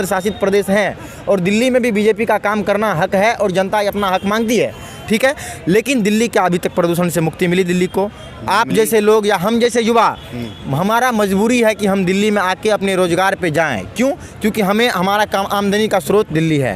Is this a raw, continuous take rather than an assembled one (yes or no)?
yes